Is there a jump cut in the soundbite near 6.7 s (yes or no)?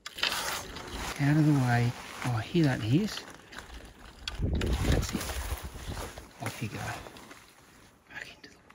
no